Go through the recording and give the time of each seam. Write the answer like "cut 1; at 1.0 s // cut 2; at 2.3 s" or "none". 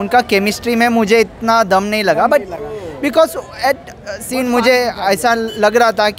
none